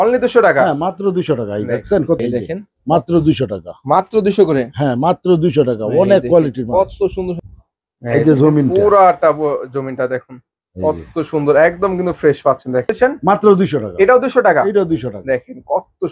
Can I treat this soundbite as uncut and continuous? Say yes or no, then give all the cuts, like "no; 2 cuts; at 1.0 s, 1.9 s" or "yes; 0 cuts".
no; 3 cuts; at 2.2 s, 7.4 s, 12.9 s